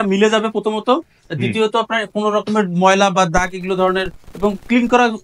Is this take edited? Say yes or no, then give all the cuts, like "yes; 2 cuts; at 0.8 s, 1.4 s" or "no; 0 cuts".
no; 0 cuts